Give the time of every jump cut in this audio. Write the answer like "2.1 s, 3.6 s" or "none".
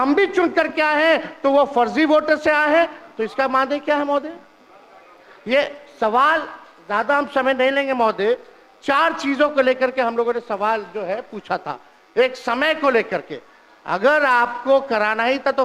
none